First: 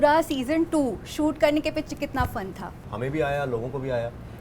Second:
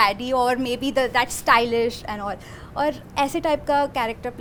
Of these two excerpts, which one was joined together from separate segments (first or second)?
first